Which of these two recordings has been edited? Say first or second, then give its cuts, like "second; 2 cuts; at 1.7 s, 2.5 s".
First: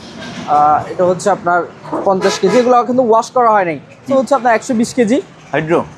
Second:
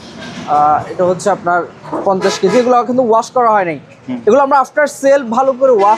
first; 1 cut; at 4.1 s